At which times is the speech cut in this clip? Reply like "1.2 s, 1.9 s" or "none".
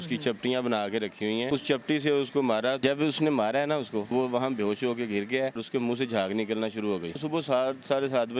1.5 s, 2.8 s, 4.1 s, 5.6 s, 7.1 s